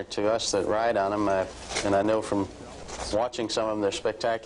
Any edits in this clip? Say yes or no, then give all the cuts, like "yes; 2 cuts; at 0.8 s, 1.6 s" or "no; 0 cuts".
no; 0 cuts